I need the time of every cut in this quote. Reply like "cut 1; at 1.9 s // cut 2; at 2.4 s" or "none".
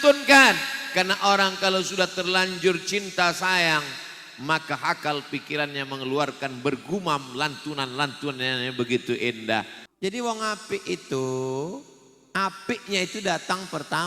cut 1; at 9.8 s